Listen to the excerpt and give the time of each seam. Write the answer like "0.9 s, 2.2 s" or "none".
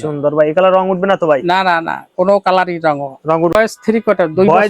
3.5 s